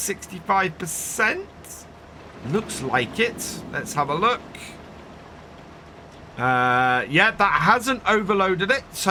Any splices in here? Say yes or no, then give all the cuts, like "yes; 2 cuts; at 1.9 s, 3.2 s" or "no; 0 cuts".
no; 0 cuts